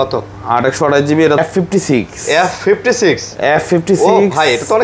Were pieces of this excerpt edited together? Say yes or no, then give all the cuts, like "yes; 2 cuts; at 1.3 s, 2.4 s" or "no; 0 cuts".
yes; 1 cut; at 1.4 s